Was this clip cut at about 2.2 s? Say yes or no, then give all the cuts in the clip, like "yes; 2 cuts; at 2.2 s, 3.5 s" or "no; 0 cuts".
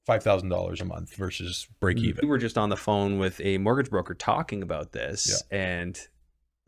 yes; 1 cut; at 2.2 s